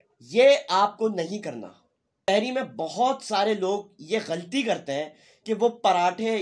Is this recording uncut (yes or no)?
no